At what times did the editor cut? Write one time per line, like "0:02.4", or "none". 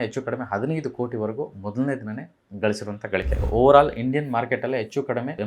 0:03.5